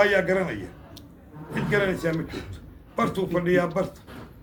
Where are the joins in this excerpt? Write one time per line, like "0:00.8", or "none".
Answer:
none